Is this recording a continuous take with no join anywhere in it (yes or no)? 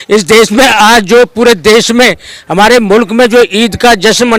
yes